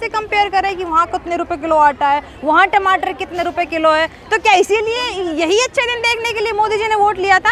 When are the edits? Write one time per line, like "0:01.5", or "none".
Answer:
none